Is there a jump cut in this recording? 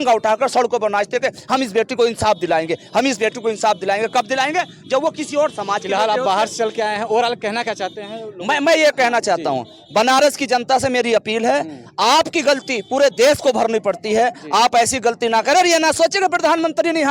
no; 0 cuts

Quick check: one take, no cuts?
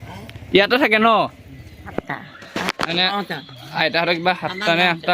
no; 1 cut; at 1.9 s

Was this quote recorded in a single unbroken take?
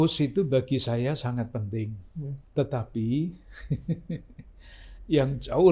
no; 1 cut; at 2.4 s

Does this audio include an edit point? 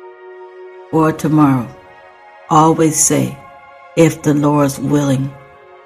yes; 1 cut; at 0.9 s

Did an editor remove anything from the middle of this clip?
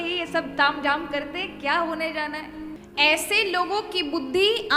yes; 1 cut; at 2.8 s

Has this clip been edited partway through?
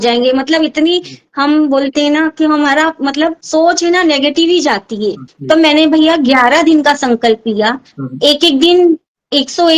yes; 1 cut; at 5.3 s

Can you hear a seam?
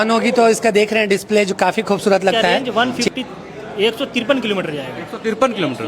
yes; 1 cut; at 2.7 s

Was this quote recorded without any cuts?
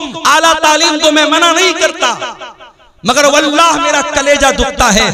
yes; 0 cuts

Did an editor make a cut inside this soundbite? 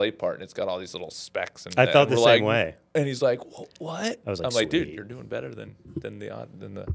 no; 0 cuts

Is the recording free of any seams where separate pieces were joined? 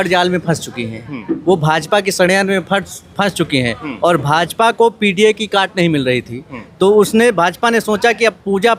yes; 0 cuts

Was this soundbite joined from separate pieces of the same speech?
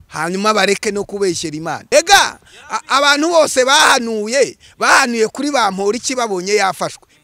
yes; 1 cut; at 1.8 s

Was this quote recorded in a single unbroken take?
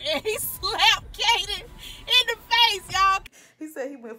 no; 1 cut; at 3.2 s

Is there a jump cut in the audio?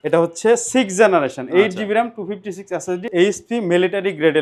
yes; 1 cut; at 3.1 s

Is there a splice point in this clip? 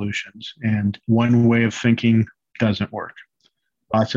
yes; 2 cuts; at 1.0 s, 2.4 s

